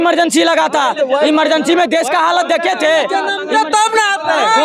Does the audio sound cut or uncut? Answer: uncut